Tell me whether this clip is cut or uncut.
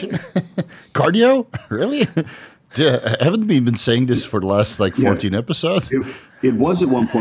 uncut